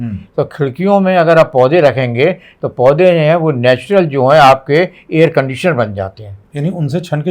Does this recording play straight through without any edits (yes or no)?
yes